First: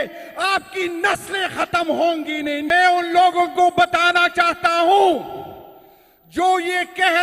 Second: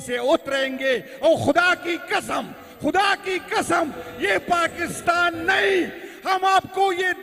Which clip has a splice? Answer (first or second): first